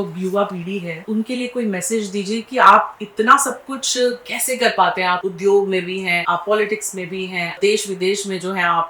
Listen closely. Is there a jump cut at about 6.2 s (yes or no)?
yes